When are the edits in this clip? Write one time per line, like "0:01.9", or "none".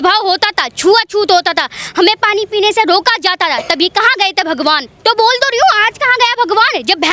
0:04.9